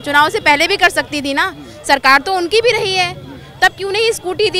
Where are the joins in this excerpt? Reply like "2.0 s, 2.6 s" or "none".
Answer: none